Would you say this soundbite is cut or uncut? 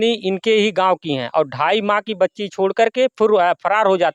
uncut